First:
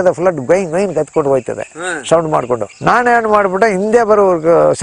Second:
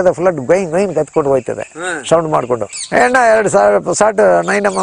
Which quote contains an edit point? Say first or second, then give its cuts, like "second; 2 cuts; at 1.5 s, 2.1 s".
second; 1 cut; at 2.7 s